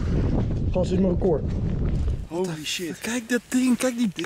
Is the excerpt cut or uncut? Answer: cut